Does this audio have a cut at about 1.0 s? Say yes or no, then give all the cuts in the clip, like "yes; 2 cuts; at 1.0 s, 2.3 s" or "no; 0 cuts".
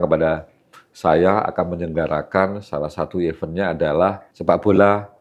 no; 1 cut; at 4.3 s